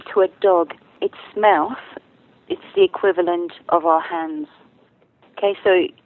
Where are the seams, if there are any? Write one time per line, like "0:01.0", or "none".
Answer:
0:01.0